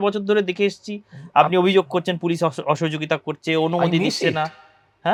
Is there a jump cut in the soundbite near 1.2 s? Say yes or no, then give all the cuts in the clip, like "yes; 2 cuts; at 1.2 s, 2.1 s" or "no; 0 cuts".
no; 0 cuts